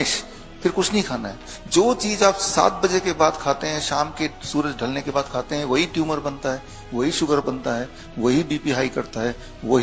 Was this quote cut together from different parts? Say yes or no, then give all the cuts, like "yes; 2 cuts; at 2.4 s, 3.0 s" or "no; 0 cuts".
no; 0 cuts